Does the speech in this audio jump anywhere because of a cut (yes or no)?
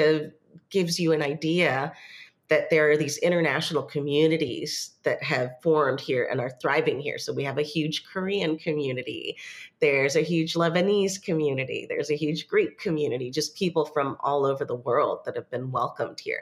no